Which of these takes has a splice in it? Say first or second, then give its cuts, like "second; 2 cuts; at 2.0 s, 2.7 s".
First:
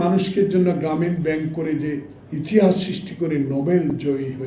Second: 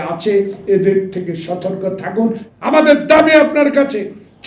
second; 1 cut; at 2.4 s